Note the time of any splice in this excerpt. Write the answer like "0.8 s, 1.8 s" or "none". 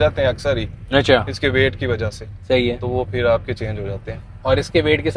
none

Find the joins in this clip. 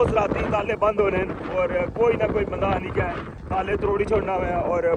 none

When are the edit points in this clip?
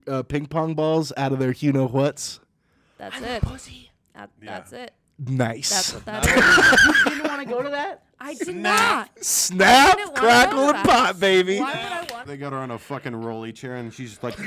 12.3 s

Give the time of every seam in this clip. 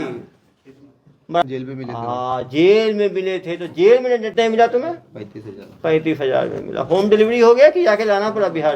1.4 s, 4.3 s

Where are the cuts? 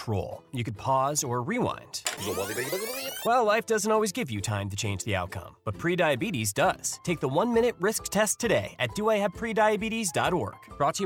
none

